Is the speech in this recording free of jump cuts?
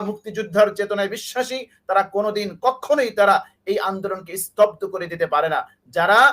yes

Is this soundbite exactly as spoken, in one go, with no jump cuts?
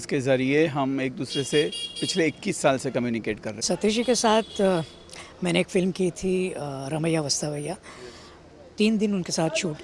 no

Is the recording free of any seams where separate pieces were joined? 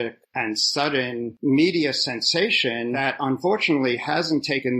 no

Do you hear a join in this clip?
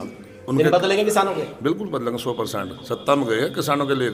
no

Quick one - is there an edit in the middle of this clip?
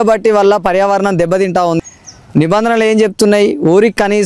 yes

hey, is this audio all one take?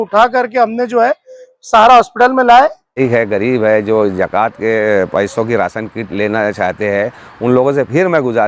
no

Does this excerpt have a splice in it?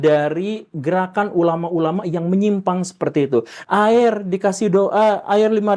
yes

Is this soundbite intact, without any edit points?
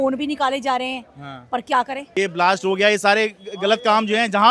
no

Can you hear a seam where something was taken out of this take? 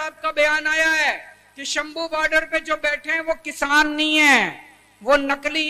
no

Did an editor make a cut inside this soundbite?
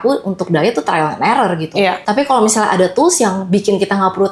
yes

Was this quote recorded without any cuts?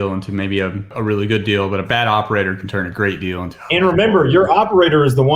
no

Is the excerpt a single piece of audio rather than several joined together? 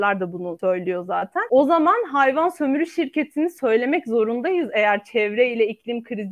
no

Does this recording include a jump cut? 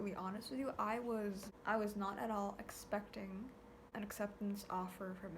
yes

